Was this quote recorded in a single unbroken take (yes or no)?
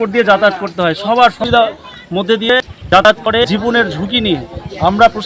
no